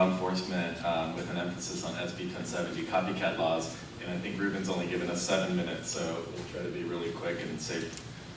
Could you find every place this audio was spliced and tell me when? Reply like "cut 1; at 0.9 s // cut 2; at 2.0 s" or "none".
cut 1; at 1.6 s